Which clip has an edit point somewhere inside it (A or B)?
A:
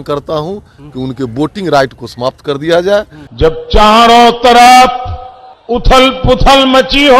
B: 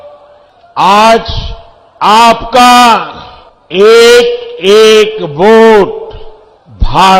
A